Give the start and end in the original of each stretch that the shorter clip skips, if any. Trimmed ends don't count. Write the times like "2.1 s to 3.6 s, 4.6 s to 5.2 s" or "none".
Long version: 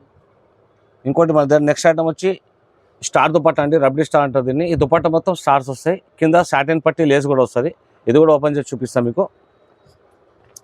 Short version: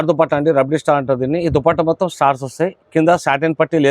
none